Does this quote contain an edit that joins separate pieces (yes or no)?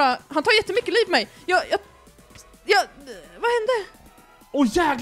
no